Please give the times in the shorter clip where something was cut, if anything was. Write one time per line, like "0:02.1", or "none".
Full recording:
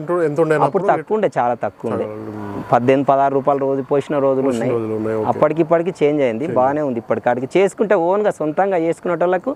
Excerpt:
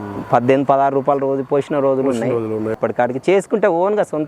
0:02.7